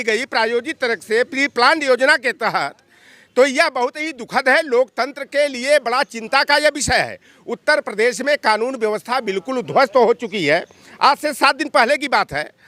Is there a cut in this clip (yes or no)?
no